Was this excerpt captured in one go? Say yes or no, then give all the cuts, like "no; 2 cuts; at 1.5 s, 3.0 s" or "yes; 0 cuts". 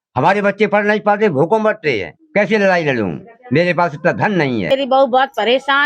no; 2 cuts; at 2.1 s, 4.7 s